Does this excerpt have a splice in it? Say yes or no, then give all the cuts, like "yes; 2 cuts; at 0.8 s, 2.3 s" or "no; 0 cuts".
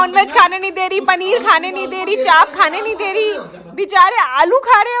no; 0 cuts